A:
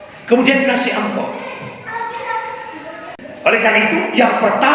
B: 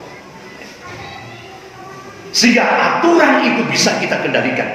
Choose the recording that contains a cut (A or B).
A